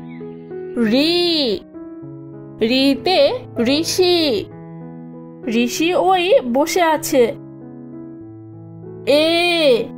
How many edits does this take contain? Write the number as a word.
one